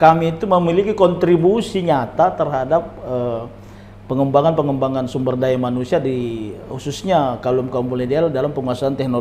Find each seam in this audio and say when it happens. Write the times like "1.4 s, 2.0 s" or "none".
none